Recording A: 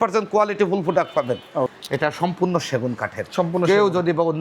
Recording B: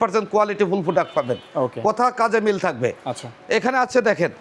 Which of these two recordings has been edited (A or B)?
A